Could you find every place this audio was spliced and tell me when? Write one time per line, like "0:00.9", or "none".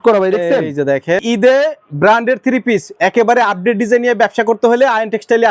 0:01.2